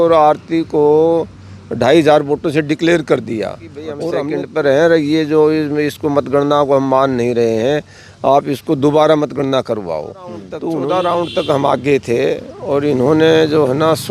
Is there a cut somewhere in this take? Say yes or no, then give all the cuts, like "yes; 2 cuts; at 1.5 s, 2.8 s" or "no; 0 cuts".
yes; 2 cuts; at 4.2 s, 10.5 s